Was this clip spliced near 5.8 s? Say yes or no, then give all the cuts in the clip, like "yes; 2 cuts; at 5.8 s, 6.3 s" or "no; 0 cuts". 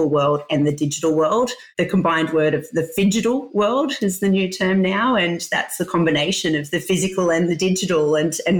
no; 1 cut; at 1.6 s